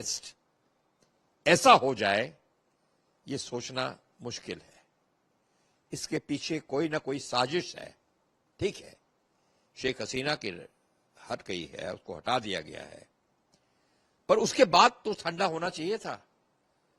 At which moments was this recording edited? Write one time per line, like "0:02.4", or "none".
none